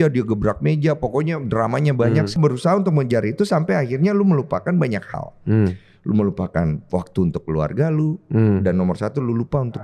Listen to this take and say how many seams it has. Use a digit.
1